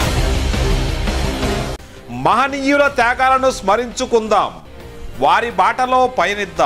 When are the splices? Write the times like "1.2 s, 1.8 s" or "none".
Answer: 1.9 s